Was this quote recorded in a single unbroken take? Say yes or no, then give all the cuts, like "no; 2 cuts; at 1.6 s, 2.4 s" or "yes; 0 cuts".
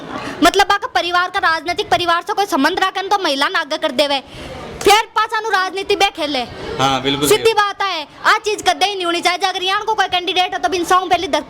yes; 0 cuts